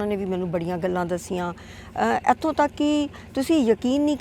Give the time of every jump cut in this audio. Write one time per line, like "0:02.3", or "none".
none